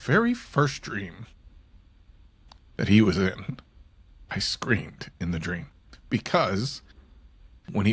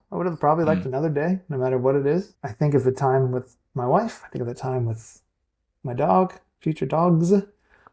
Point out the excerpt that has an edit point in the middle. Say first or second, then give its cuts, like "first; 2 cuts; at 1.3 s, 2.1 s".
second; 1 cut; at 2.4 s